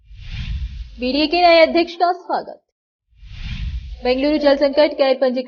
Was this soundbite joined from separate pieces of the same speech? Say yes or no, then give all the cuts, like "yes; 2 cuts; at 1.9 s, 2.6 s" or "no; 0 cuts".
yes; 1 cut; at 0.9 s